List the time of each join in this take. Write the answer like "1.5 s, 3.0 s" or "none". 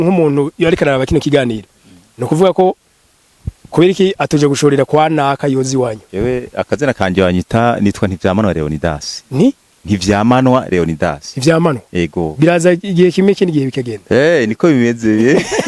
6.0 s